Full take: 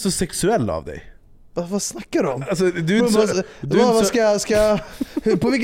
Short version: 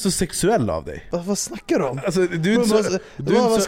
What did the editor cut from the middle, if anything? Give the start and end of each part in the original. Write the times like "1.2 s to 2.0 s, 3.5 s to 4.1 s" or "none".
0.9 s to 1.4 s